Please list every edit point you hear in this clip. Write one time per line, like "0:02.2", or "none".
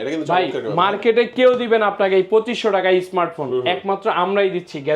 none